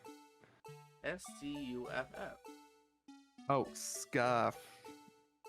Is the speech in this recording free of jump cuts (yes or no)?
no